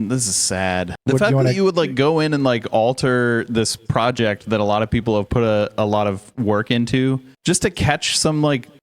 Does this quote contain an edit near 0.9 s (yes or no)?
yes